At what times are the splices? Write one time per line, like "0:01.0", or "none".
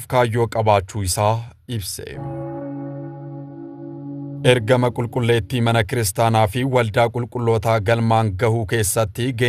0:02.1
0:04.4